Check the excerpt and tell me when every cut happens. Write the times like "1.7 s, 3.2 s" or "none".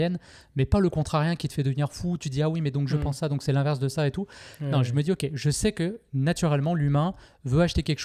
none